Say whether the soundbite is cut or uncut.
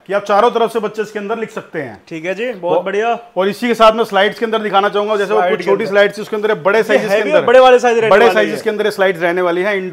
uncut